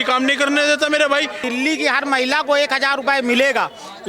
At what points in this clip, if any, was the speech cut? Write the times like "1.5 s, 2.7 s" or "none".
1.4 s